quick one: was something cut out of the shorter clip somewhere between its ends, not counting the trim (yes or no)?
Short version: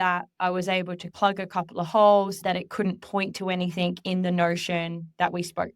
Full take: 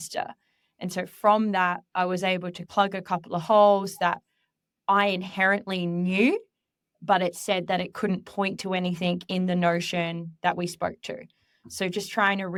yes